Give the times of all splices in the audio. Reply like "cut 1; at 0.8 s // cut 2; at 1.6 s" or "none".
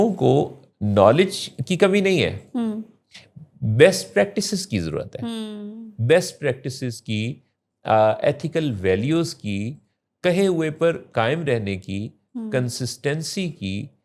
none